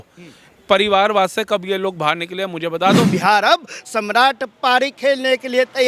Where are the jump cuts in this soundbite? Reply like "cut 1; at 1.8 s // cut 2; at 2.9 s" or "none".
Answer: cut 1; at 3.1 s